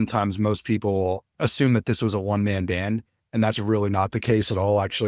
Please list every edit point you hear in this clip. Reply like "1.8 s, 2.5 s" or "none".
1.3 s